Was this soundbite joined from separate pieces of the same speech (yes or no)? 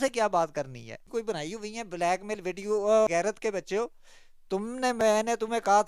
yes